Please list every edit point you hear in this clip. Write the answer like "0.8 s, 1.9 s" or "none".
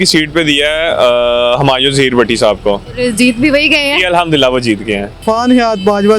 2.9 s, 5.2 s